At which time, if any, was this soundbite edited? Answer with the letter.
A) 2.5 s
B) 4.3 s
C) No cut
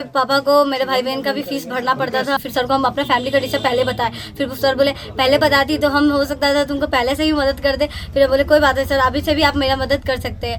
A